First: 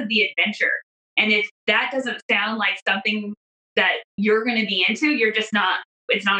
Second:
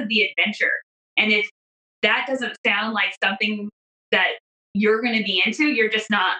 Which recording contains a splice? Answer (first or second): first